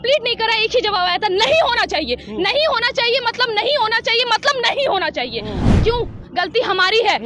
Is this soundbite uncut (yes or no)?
no